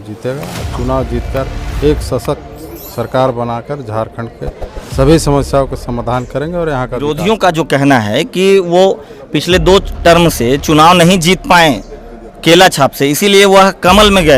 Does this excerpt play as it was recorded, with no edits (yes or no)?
no